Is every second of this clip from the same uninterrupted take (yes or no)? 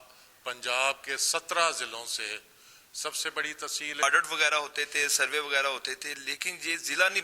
no